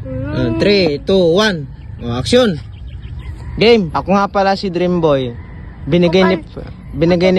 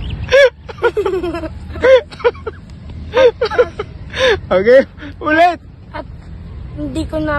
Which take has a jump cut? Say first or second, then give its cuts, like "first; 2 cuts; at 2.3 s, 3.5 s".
first; 1 cut; at 3.9 s